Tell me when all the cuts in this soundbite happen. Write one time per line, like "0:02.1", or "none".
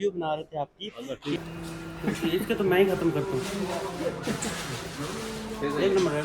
0:01.4